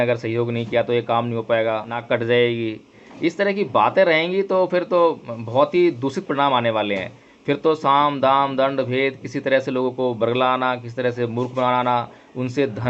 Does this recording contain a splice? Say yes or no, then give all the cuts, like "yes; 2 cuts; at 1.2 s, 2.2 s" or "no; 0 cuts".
yes; 1 cut; at 2.0 s